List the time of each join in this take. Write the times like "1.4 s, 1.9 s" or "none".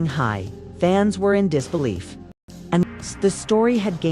2.6 s